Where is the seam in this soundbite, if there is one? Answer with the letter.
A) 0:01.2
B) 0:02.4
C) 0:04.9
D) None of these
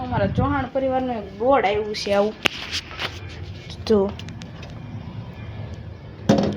D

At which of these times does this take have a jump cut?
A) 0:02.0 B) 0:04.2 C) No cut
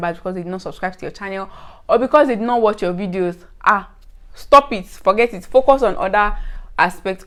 C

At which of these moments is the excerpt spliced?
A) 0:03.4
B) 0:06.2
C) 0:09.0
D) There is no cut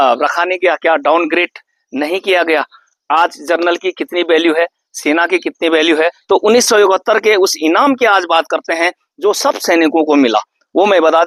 B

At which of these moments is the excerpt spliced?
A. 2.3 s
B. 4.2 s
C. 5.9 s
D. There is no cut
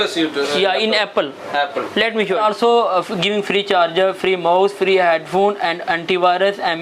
A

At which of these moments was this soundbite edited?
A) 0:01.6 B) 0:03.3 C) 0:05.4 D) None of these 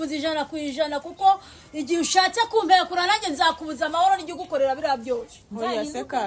C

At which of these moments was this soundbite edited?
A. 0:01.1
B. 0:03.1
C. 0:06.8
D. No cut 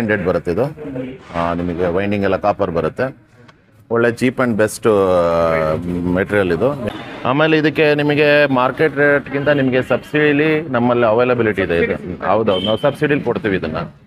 C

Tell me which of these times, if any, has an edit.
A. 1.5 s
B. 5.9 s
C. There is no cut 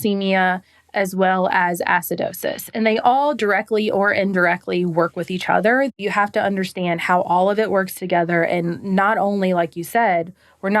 B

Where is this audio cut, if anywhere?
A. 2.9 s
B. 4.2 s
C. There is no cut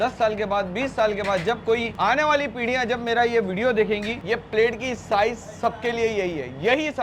B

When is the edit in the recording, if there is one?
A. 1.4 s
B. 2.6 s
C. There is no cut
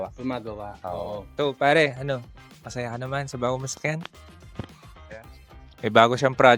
A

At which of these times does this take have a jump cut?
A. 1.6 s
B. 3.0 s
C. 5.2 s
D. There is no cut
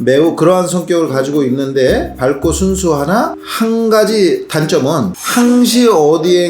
C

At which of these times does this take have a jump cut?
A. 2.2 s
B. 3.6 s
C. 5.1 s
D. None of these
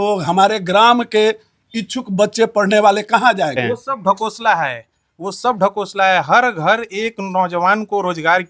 B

